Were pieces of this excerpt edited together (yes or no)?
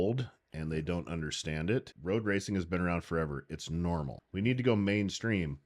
yes